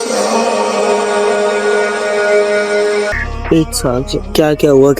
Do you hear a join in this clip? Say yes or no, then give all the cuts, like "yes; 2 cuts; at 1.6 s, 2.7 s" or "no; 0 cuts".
yes; 1 cut; at 3.1 s